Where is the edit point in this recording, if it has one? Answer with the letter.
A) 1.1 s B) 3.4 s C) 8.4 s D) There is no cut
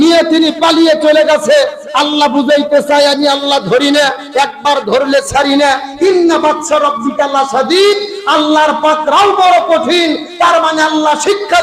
D